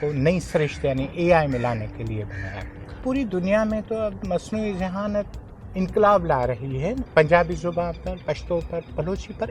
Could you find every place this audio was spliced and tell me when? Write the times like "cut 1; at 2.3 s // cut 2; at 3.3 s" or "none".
cut 1; at 3.0 s // cut 2; at 7.0 s